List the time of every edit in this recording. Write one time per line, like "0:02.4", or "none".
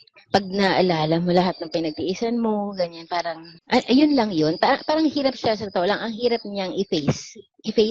0:03.5